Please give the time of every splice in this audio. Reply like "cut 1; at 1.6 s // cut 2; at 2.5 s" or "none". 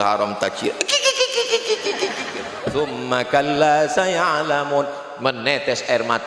cut 1; at 2.7 s